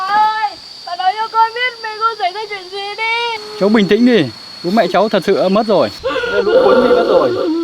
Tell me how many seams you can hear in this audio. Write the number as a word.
two